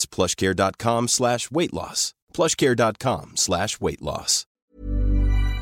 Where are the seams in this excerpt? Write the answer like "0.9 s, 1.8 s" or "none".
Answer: 4.6 s